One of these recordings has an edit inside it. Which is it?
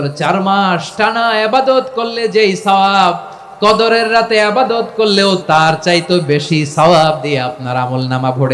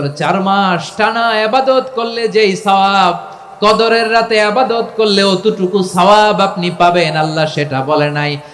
first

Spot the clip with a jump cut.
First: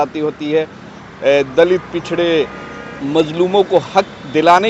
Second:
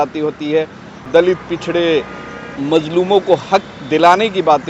second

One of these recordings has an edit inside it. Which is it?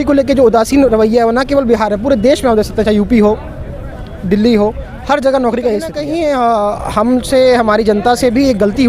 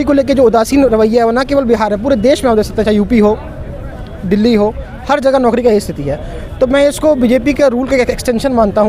first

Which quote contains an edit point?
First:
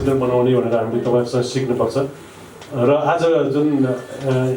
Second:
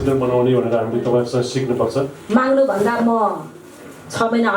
second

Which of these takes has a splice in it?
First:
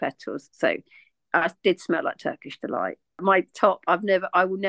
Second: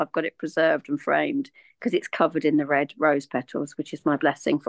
first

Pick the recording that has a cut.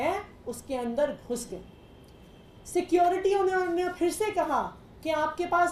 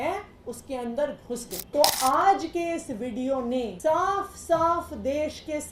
second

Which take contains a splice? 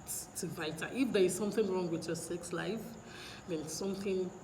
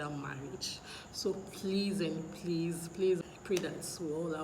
second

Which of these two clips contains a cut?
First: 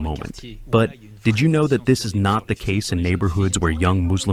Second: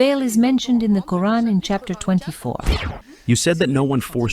second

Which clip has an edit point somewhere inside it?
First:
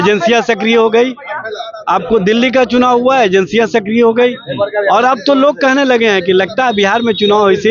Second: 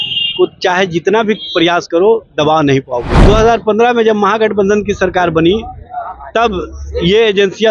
second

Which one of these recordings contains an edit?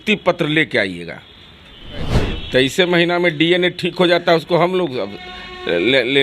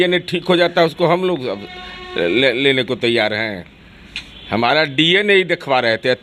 first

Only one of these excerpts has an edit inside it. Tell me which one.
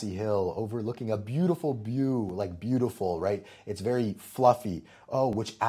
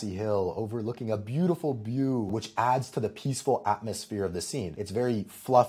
second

